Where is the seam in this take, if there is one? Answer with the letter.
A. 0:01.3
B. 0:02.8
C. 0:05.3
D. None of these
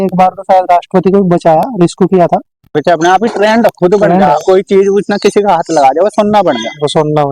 B